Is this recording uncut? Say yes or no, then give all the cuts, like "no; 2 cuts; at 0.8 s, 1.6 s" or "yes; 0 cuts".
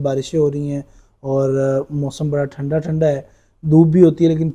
yes; 0 cuts